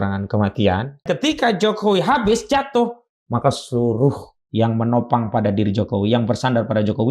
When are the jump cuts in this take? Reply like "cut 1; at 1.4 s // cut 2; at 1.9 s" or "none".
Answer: cut 1; at 1.0 s